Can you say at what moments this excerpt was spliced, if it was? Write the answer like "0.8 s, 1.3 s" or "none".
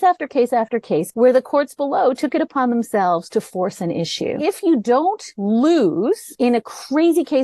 1.1 s, 4.4 s, 5.3 s, 6.3 s

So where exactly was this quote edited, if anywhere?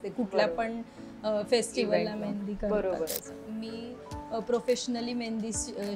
3.2 s

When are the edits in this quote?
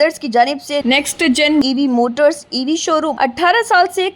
3.1 s

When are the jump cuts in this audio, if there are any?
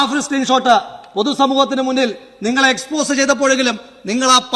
none

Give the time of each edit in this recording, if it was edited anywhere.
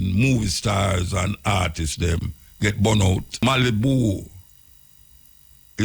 3.4 s

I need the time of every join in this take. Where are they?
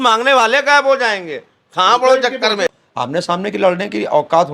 2.7 s

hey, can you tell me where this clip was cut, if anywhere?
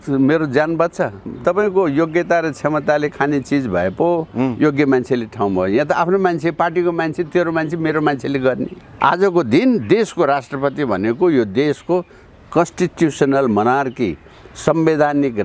1.4 s, 8.8 s

